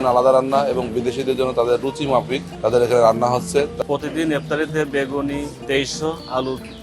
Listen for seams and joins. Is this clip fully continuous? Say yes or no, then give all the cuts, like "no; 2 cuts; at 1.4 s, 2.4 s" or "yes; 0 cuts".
no; 3 cuts; at 2.4 s, 3.7 s, 5.5 s